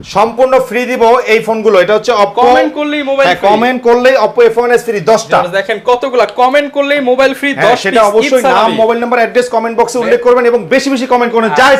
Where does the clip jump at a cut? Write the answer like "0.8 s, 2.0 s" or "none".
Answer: none